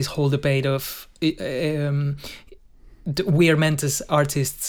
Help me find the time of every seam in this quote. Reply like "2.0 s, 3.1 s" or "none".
none

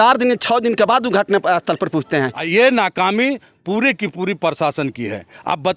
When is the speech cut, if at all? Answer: 2.4 s

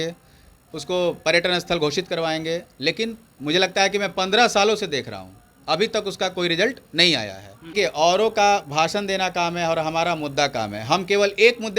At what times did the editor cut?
7.7 s

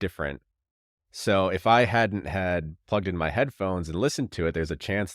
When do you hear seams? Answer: none

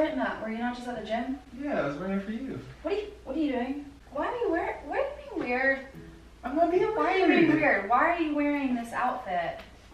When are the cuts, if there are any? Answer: none

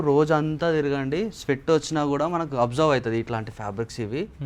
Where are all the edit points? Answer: none

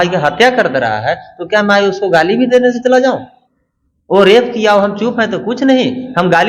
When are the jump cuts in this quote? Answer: none

